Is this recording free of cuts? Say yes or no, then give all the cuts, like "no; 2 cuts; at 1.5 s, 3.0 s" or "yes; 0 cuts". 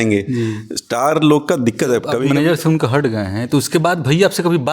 no; 1 cut; at 2.1 s